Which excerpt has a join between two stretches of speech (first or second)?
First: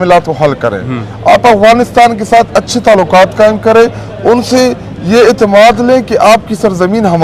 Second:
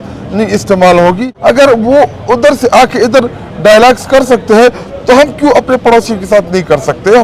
second